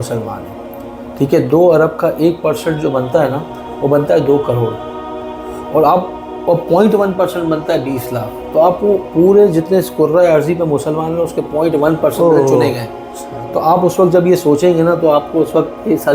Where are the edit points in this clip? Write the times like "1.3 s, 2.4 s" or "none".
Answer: none